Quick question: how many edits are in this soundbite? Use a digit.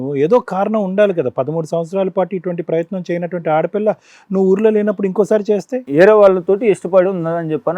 1